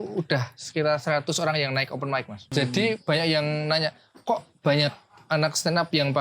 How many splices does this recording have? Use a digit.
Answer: 1